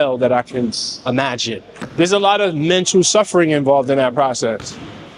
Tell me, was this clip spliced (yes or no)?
no